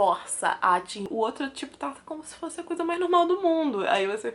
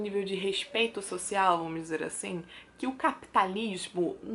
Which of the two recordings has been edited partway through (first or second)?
first